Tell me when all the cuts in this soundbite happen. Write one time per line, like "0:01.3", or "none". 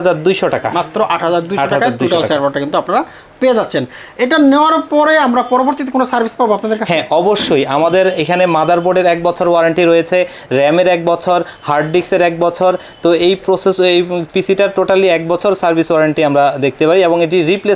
none